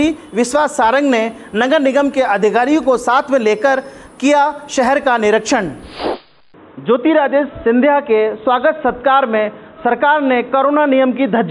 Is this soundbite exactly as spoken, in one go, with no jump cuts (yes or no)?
no